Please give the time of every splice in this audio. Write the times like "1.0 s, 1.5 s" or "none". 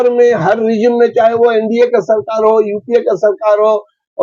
none